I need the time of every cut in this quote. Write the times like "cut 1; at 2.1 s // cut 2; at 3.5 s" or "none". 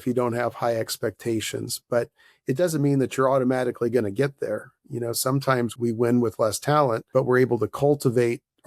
cut 1; at 5.7 s // cut 2; at 7.0 s